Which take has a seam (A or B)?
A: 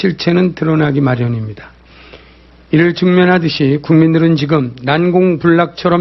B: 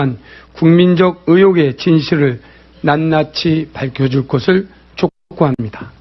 B